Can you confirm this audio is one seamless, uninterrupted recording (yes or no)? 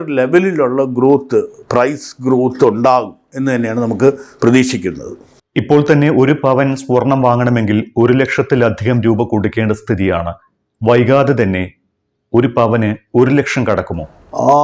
yes